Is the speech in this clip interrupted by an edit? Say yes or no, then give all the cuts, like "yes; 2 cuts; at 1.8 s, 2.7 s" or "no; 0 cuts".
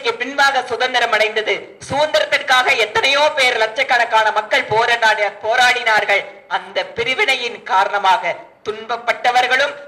no; 0 cuts